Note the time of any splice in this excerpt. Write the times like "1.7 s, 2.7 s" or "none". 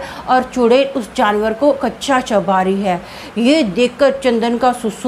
none